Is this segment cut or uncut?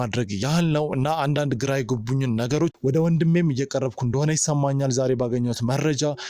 cut